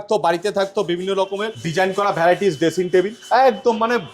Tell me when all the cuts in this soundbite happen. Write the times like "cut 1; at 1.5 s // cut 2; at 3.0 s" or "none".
cut 1; at 1.6 s // cut 2; at 3.2 s